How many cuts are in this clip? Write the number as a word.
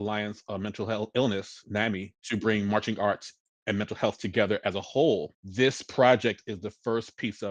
two